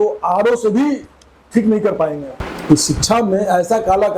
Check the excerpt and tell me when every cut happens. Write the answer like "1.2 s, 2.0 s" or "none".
2.3 s

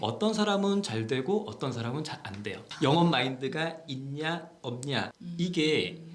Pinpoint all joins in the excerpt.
2.7 s, 5.2 s

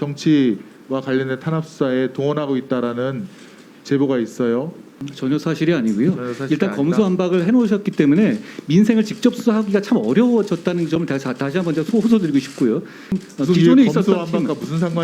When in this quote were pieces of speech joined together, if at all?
5.0 s, 13.2 s

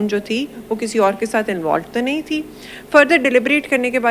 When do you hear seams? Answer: none

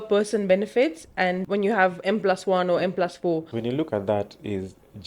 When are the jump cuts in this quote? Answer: 1.4 s, 3.5 s

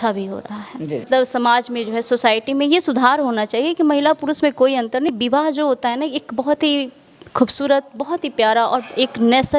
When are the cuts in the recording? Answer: 1.1 s, 5.1 s

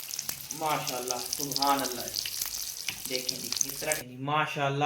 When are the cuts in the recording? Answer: 3.9 s

